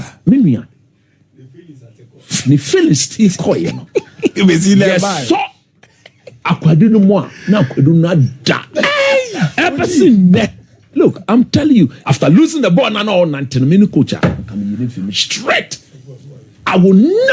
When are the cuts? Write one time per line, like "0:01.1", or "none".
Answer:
0:12.0